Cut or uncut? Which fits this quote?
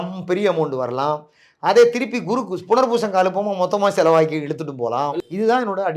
uncut